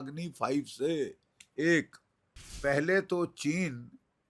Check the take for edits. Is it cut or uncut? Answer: cut